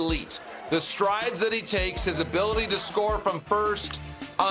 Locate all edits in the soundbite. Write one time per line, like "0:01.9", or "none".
none